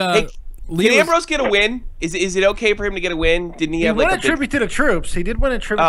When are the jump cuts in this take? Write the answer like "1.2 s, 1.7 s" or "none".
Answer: 4.0 s